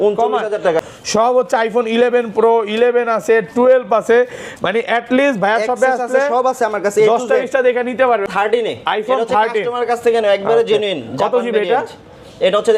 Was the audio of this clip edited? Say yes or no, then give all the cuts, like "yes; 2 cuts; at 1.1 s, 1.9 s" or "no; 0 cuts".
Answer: yes; 2 cuts; at 0.8 s, 8.3 s